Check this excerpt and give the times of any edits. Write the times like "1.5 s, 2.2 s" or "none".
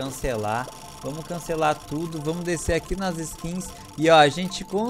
none